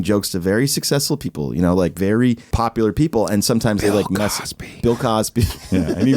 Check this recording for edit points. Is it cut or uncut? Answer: cut